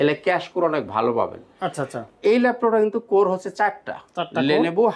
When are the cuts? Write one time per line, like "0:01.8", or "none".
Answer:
none